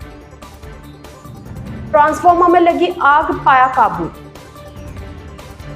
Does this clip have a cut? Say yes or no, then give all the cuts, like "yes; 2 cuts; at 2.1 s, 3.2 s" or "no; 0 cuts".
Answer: no; 0 cuts